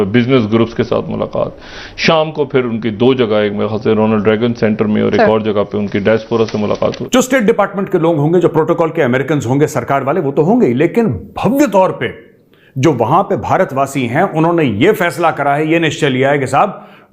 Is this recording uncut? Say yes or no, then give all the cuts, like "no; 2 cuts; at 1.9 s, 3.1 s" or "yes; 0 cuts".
no; 1 cut; at 7.0 s